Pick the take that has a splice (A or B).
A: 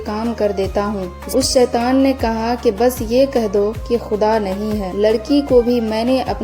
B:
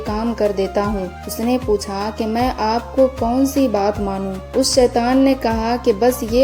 A